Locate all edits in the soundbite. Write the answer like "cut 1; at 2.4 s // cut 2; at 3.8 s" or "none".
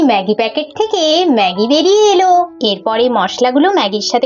cut 1; at 2.5 s